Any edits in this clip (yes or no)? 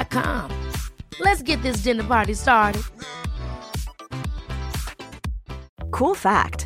yes